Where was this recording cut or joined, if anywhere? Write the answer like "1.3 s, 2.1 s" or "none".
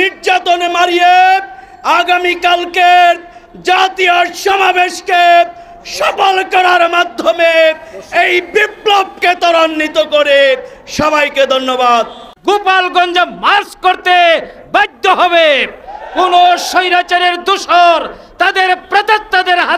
12.2 s

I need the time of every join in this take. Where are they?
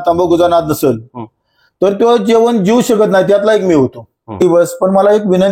4.4 s

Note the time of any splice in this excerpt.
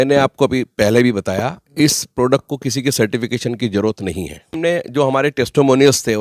4.5 s

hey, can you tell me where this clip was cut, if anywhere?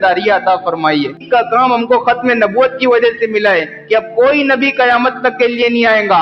1.2 s

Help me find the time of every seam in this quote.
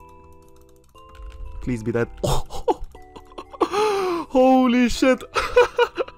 none

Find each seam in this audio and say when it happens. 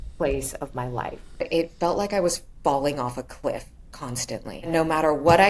1.5 s, 4.7 s

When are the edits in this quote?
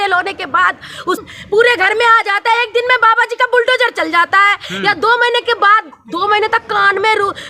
1.2 s

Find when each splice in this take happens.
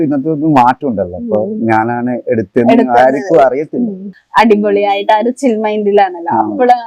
4.1 s

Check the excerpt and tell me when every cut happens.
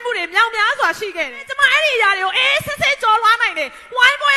1.5 s

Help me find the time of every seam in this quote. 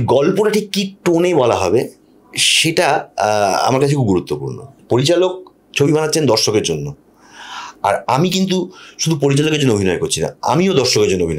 none

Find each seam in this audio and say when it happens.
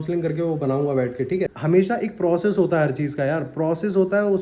1.6 s

